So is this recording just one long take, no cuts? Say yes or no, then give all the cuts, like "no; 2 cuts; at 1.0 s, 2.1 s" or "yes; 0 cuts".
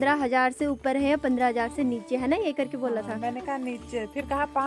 yes; 0 cuts